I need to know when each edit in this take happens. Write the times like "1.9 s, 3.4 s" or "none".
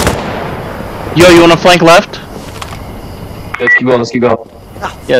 none